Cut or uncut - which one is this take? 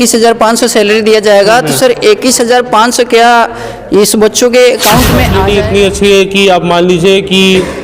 cut